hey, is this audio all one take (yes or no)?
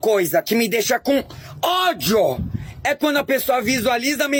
yes